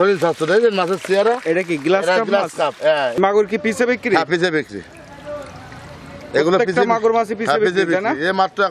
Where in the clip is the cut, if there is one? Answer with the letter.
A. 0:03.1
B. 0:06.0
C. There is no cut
A